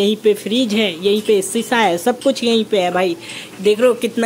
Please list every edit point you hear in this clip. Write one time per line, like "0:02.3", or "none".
none